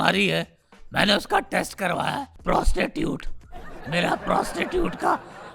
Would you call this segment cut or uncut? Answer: cut